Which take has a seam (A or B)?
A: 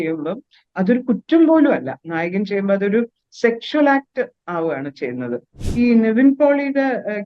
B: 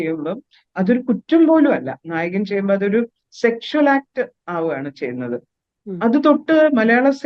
A